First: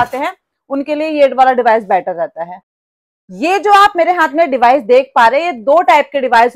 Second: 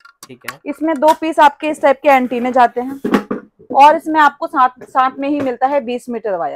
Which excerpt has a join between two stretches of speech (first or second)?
first